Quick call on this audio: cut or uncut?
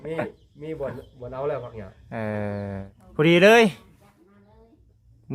cut